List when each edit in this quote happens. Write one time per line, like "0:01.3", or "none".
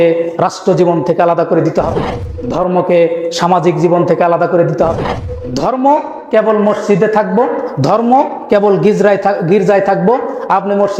none